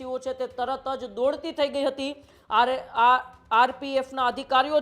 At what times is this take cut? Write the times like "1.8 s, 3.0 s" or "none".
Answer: none